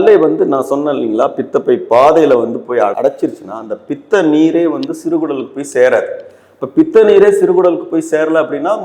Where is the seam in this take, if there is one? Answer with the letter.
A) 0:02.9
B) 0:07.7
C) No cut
C